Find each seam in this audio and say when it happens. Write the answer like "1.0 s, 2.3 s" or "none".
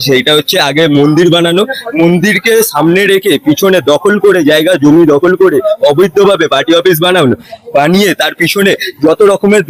none